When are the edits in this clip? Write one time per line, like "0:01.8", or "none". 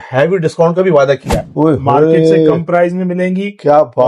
0:01.4